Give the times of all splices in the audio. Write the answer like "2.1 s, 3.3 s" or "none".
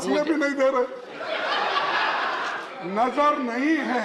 2.7 s